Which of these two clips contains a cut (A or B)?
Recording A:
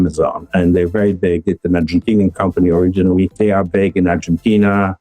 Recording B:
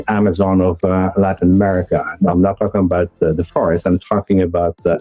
A